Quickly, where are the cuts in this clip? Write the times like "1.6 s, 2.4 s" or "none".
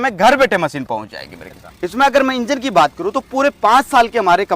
1.7 s